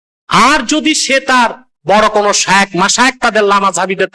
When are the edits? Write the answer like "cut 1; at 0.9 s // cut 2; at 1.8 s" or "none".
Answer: cut 1; at 1.8 s